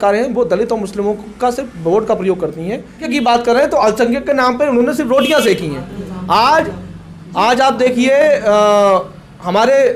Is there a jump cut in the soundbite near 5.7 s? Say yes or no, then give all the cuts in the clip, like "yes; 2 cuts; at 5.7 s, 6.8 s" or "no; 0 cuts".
no; 1 cut; at 3.1 s